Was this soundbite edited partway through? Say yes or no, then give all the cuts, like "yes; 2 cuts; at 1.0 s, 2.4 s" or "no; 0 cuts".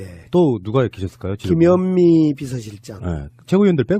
no; 0 cuts